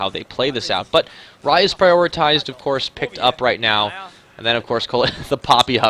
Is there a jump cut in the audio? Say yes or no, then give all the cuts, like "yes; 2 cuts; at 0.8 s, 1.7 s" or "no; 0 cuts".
yes; 1 cut; at 2.1 s